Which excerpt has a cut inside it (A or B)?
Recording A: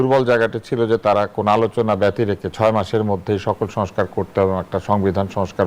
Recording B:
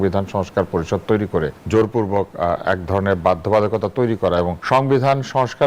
B